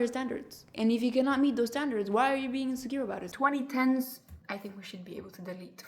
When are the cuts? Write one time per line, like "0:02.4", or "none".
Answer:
0:03.3
0:04.3